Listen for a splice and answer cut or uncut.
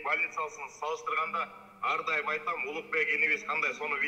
uncut